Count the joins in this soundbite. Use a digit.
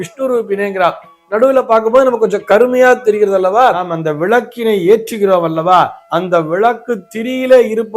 1